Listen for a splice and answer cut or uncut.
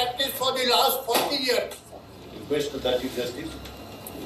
uncut